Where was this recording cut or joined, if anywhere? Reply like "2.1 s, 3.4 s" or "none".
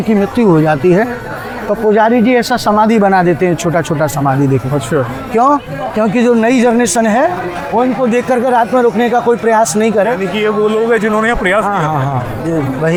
none